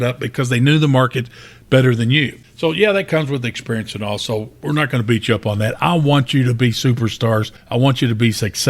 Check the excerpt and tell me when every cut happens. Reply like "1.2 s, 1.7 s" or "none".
2.4 s, 7.6 s